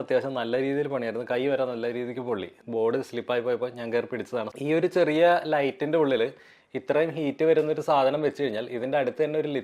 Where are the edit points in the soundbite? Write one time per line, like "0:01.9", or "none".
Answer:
0:02.6
0:04.5